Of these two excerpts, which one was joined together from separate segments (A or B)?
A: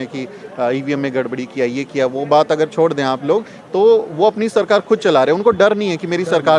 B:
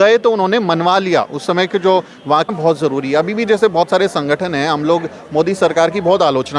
B